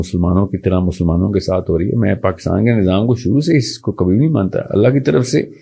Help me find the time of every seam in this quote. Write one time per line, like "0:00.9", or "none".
none